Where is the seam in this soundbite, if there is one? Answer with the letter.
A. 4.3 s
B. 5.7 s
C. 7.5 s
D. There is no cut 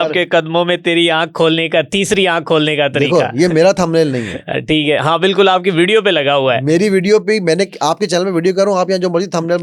D